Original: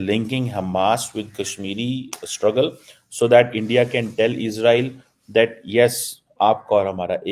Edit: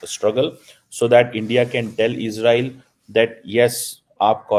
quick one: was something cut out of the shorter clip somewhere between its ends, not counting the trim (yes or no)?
no